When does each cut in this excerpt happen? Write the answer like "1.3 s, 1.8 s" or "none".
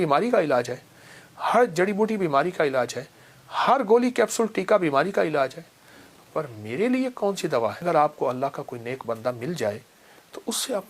7.8 s